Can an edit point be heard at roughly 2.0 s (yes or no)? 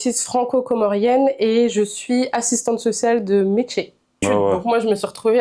no